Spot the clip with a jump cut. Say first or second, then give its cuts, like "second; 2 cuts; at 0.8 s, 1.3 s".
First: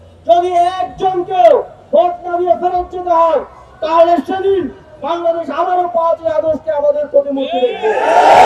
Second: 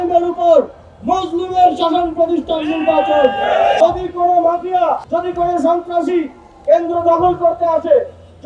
second; 1 cut; at 3.8 s